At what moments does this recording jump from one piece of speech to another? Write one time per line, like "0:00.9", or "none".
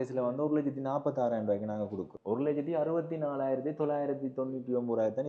0:02.1

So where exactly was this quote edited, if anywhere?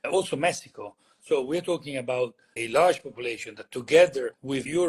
0:02.5

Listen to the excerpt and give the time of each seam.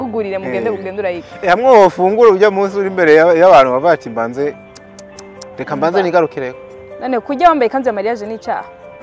none

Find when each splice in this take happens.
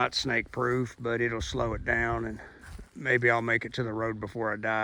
none

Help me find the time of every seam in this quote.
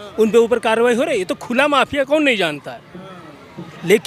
none

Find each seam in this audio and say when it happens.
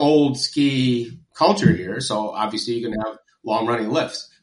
none

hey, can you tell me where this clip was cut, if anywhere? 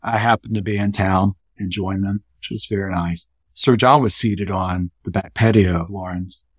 0:01.5
0:03.4

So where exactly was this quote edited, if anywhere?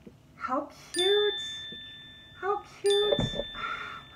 0:03.1

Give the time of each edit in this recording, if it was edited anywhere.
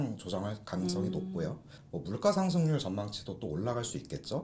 0:01.7

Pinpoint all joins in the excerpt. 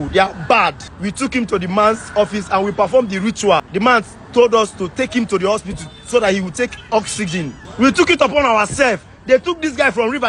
0:00.9
0:03.7
0:07.6

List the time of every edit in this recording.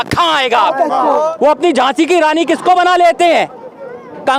0:01.3

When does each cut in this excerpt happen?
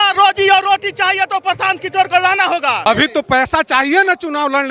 0:02.9

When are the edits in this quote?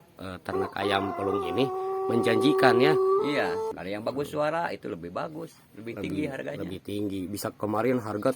0:03.7

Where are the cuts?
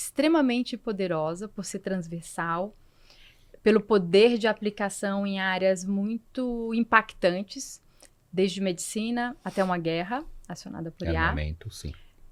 none

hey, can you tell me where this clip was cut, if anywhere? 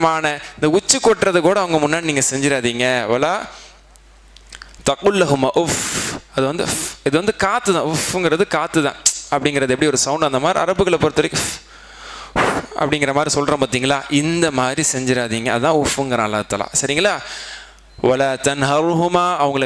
none

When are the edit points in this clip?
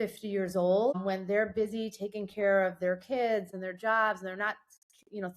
0:01.0
0:03.5

